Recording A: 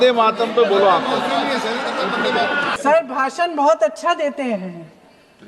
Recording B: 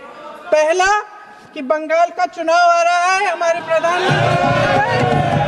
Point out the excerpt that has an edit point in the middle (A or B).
A